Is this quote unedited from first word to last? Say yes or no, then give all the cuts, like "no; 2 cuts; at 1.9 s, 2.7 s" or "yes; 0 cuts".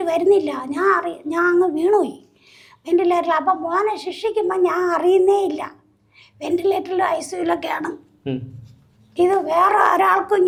yes; 0 cuts